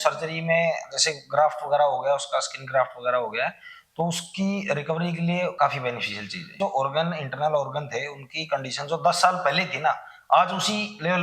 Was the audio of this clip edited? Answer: yes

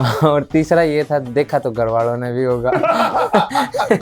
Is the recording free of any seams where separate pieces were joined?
yes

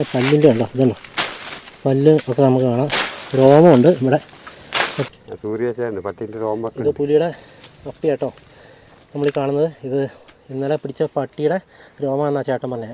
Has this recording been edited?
yes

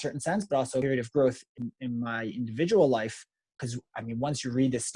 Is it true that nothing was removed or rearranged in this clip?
no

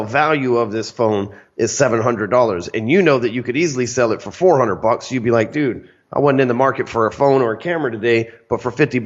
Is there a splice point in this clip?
no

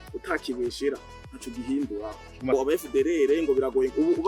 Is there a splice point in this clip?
yes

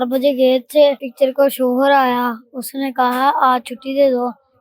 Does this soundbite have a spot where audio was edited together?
yes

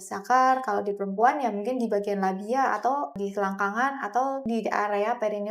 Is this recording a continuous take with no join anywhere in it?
no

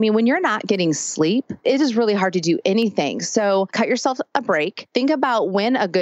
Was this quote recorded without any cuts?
no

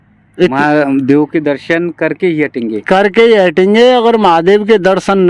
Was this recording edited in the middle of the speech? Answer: no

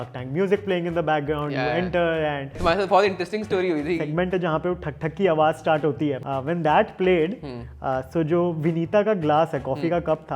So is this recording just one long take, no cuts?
no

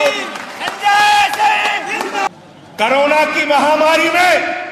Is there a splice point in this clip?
yes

